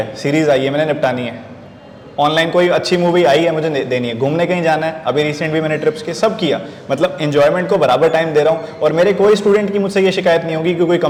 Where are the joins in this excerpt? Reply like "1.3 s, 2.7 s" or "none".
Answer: none